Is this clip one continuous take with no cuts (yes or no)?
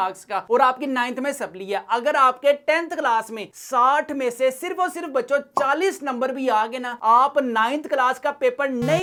yes